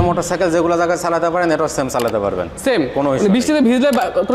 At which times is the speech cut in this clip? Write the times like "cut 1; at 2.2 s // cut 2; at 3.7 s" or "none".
none